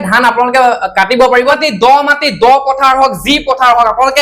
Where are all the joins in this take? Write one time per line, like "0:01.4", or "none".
0:01.6